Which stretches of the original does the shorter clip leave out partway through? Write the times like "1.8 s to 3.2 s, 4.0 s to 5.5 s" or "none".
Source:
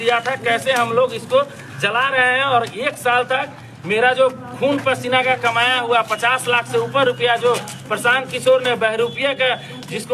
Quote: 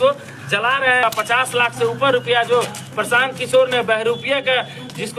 2.3 s to 6.0 s